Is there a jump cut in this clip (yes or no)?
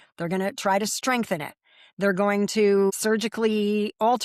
yes